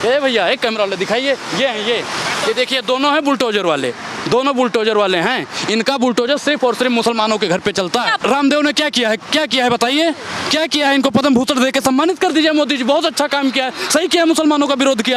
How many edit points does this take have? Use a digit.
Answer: 1